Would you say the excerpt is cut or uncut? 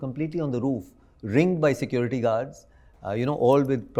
uncut